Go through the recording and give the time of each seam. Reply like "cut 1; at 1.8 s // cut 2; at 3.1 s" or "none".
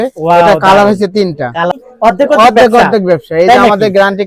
cut 1; at 1.7 s